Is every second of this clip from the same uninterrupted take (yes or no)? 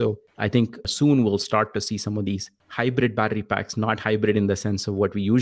no